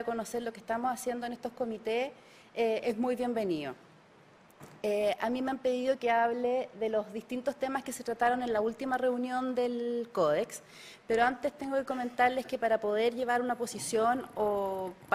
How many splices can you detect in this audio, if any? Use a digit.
0